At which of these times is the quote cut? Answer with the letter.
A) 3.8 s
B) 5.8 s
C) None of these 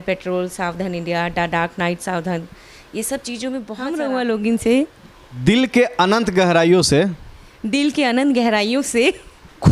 A